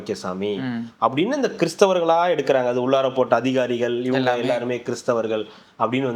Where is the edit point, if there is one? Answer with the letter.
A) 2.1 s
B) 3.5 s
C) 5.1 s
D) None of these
D